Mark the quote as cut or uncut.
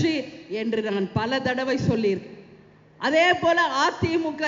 uncut